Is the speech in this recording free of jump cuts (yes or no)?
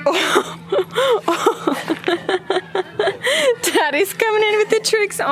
yes